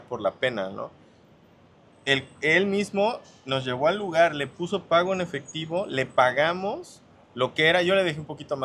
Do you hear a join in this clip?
no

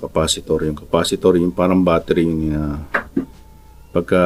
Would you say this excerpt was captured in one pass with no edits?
yes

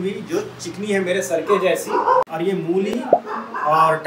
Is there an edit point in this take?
yes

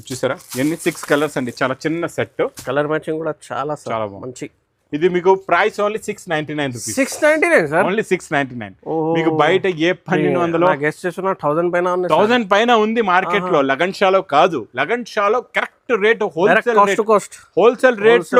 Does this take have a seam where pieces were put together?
no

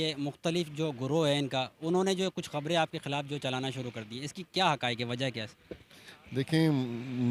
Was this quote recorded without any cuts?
yes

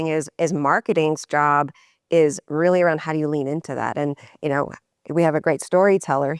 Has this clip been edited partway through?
no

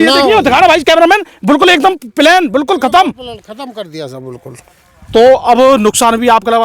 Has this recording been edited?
no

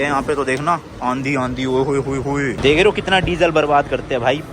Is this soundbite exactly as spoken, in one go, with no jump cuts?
no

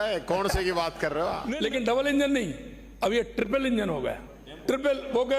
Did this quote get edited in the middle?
yes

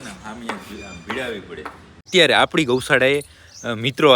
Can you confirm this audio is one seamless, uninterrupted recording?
no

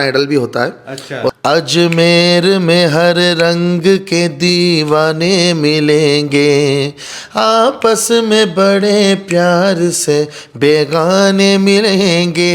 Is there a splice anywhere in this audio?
yes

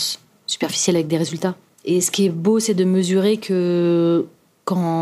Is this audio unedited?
no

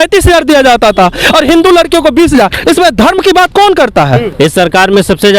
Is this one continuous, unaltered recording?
no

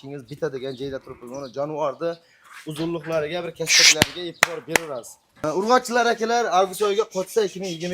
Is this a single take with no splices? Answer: no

